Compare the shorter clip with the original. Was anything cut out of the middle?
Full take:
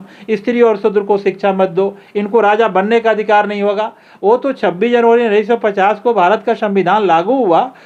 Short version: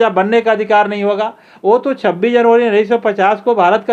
no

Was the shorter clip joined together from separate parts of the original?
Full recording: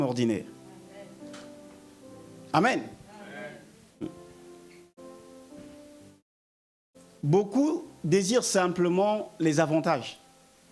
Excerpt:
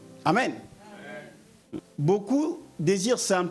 yes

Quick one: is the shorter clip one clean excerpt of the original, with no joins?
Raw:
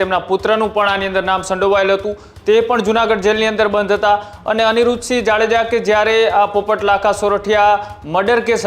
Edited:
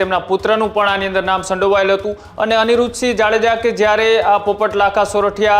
no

